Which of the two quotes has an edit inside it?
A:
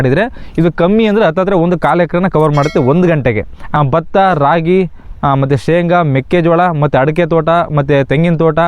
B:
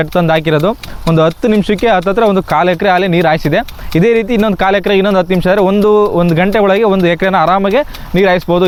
A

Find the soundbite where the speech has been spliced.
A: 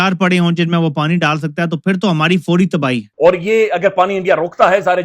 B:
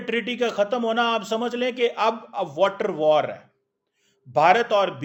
A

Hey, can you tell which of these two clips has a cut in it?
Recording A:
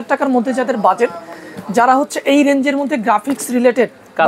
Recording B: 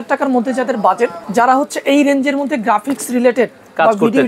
B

